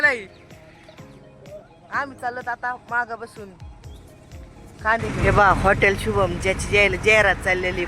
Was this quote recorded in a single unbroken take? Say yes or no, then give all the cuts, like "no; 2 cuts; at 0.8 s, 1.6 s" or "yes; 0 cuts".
no; 1 cut; at 5.2 s